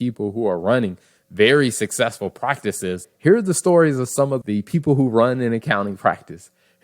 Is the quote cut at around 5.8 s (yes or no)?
no